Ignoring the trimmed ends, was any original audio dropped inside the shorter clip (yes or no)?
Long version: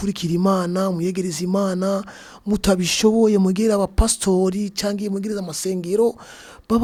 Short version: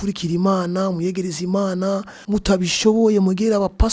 yes